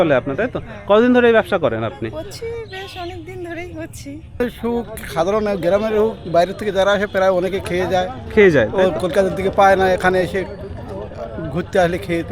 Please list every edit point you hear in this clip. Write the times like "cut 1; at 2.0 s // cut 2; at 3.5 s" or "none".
cut 1; at 4.4 s